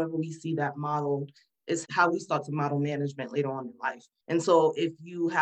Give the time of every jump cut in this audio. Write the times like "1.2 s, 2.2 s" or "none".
4.1 s